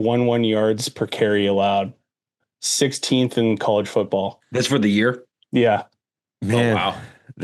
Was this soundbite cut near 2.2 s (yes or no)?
no